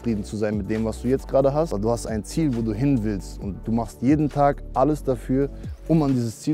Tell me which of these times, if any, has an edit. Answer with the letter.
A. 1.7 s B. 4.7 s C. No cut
A